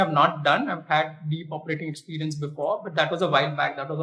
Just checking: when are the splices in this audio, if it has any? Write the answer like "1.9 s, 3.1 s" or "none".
none